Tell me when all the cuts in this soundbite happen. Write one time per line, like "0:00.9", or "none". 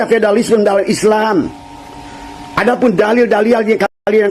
none

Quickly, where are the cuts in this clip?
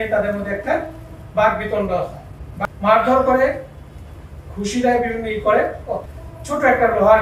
0:02.4
0:06.0

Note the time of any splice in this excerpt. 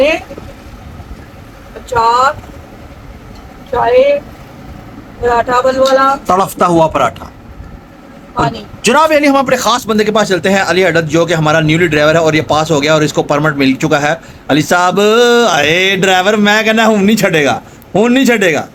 none

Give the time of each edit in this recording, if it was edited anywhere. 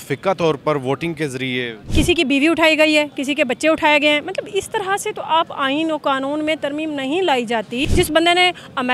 0:01.8
0:07.9

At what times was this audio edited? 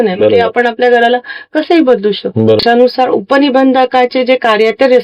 0:02.6

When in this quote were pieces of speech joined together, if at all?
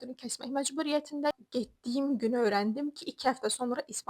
0:01.3

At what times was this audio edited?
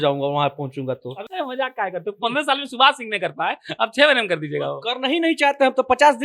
0:01.2

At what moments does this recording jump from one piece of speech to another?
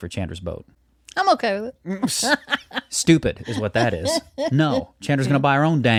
none

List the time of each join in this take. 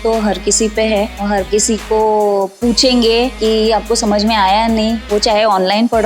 0:01.2
0:03.3

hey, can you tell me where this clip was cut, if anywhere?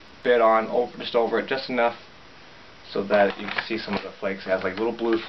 none

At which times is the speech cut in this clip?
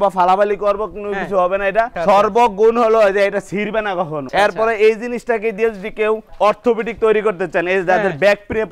none

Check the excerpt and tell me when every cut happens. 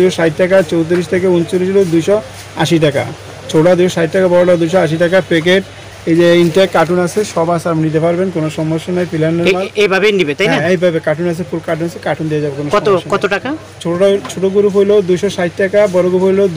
none

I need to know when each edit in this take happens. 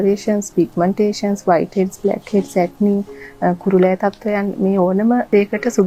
none

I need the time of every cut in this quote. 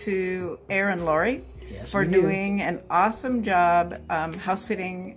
none

